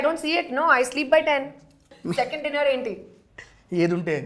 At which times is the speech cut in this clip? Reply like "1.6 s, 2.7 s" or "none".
1.9 s